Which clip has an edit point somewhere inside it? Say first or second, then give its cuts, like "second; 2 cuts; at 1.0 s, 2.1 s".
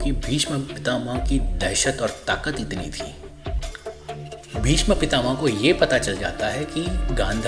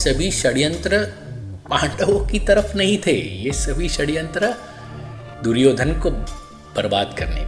first; 1 cut; at 3.6 s